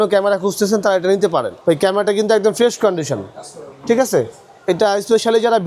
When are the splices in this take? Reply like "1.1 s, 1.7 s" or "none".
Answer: 1.5 s